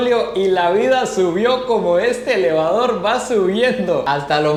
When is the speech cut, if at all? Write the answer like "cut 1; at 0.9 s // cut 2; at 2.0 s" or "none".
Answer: none